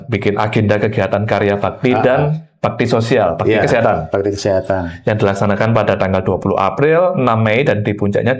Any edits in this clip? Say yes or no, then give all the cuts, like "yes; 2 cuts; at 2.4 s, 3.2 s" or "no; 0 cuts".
no; 0 cuts